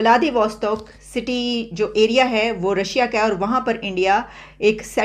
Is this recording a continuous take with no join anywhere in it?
yes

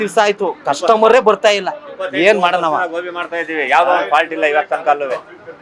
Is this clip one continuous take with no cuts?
yes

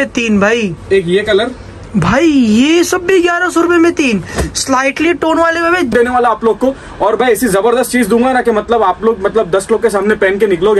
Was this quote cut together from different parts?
yes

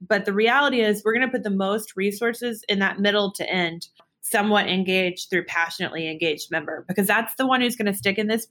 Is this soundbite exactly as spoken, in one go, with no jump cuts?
no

